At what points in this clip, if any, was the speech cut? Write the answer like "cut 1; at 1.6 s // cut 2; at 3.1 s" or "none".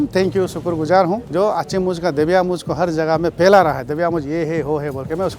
cut 1; at 1.2 s